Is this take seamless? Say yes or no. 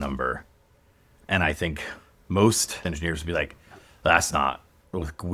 no